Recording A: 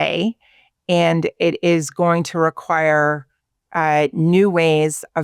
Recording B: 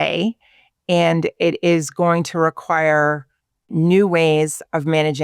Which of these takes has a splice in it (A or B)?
B